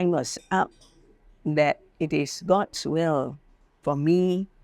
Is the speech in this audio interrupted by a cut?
no; 0 cuts

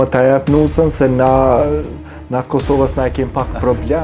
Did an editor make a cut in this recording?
no; 0 cuts

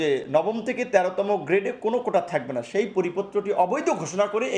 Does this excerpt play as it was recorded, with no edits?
yes; 0 cuts

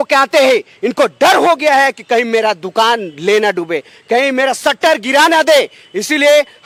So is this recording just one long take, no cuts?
yes; 0 cuts

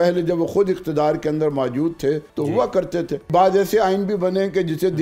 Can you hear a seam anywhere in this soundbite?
yes; 2 cuts; at 2.3 s, 3.3 s

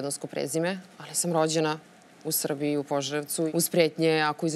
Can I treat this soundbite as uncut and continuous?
no; 1 cut; at 3.5 s

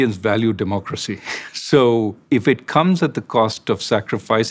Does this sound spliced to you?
yes; 1 cut; at 2.2 s

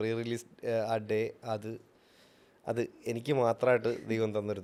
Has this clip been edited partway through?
no; 0 cuts

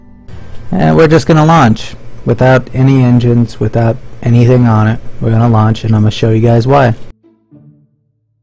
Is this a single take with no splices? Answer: no; 1 cut; at 2.5 s

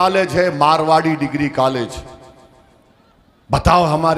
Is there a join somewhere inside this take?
no; 0 cuts

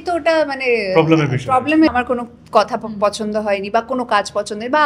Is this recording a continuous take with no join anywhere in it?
no; 1 cut; at 1.9 s

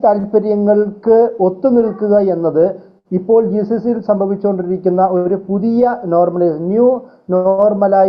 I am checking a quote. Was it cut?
no; 0 cuts

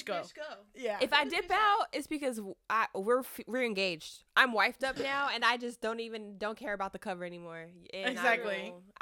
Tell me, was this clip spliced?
no; 0 cuts

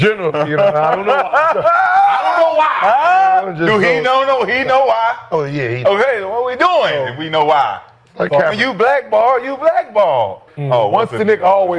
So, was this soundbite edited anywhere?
yes; 1 cut; at 10.5 s

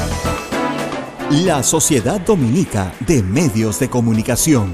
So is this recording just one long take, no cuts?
no; 1 cut; at 1.1 s

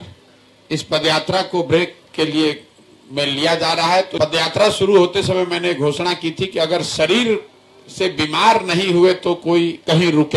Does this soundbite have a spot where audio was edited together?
yes; 1 cut; at 4.1 s

